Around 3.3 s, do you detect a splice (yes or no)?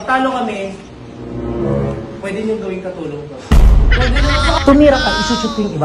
yes